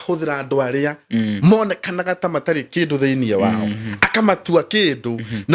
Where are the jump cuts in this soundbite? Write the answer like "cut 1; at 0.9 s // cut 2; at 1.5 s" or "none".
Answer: none